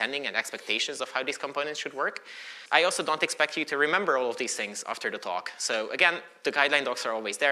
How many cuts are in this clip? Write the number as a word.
one